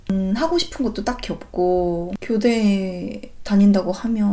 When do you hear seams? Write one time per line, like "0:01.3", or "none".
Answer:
0:02.2